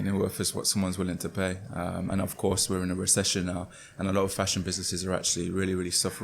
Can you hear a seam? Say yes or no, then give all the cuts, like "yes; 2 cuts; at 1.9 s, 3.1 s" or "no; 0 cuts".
no; 0 cuts